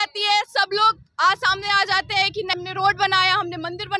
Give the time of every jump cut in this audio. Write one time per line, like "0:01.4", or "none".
0:02.5

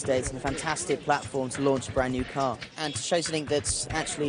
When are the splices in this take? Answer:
none

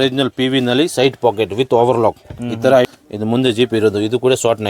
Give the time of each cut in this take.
0:02.9

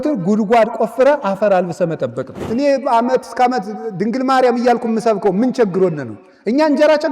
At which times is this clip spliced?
0:02.3

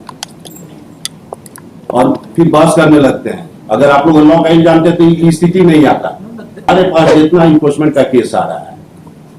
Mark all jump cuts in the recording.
0:06.7

